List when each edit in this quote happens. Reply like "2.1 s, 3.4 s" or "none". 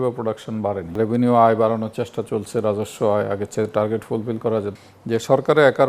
1.0 s, 4.8 s